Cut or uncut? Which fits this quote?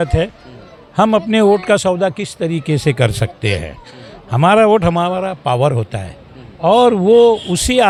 uncut